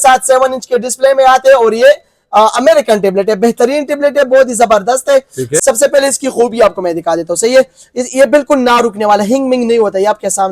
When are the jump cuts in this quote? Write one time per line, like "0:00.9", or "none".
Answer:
0:05.5